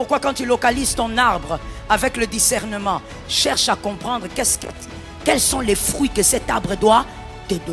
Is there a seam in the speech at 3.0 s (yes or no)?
no